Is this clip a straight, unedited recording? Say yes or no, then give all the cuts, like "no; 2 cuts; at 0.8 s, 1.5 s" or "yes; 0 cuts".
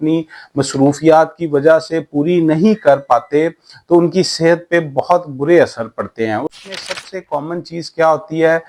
yes; 0 cuts